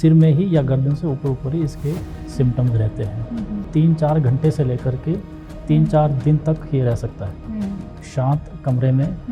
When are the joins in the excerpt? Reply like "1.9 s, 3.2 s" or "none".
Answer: 3.6 s, 8.0 s